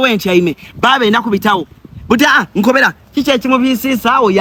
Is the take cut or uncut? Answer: uncut